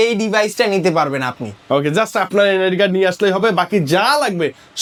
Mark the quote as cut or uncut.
uncut